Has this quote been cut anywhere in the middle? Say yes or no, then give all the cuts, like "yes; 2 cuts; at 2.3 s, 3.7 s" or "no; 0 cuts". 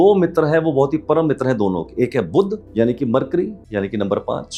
no; 0 cuts